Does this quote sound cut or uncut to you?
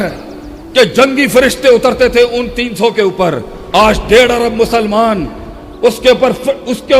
uncut